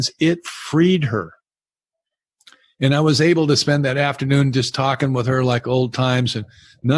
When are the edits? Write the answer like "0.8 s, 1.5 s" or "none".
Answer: none